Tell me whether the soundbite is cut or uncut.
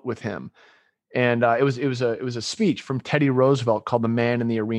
uncut